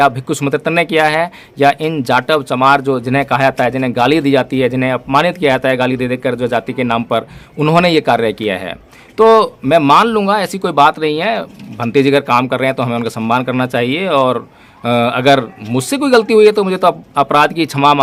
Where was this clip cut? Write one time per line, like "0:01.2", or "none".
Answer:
none